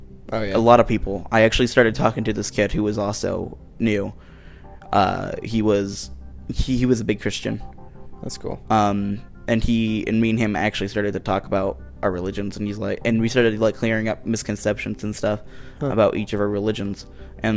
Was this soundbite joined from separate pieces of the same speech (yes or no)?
no